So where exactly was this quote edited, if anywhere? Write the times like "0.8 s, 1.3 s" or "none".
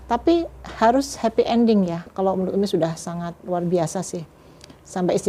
2.1 s